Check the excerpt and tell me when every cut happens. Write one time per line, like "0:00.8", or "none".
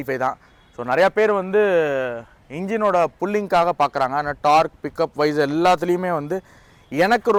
none